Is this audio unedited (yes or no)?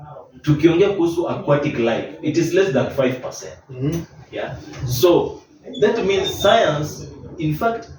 yes